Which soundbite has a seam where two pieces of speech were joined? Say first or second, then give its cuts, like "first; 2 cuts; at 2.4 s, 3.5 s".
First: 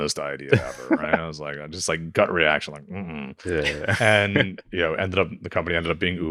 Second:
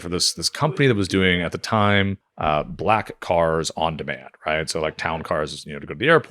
second; 1 cut; at 2.2 s